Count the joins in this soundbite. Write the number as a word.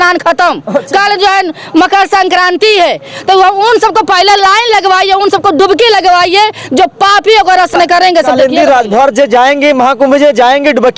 one